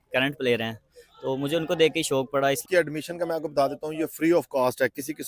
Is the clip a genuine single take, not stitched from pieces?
no; 1 cut; at 2.6 s

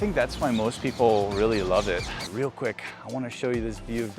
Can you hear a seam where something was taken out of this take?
yes; 1 cut; at 2.3 s

